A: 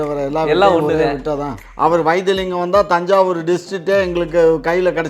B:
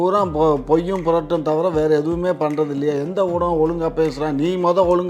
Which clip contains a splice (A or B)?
A